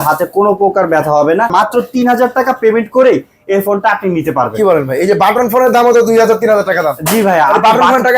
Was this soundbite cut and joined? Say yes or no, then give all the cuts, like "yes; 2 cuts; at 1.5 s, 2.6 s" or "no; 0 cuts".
yes; 1 cut; at 1.5 s